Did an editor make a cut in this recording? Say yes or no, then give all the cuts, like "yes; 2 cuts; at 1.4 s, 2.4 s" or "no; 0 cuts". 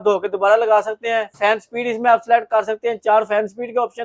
no; 0 cuts